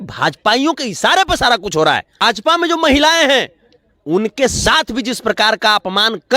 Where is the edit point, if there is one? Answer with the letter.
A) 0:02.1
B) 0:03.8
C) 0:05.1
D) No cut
A